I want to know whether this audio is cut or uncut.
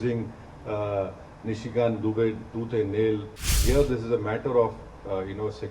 cut